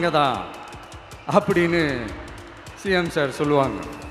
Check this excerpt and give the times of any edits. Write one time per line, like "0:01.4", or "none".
none